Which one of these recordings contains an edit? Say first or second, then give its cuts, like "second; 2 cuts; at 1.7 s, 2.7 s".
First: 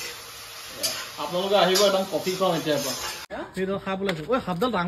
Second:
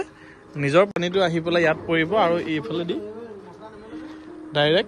first; 1 cut; at 3.3 s